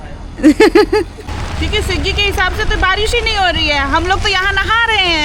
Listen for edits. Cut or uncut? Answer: cut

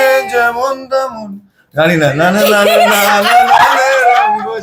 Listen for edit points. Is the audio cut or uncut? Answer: uncut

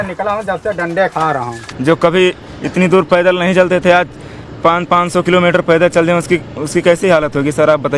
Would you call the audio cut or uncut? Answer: cut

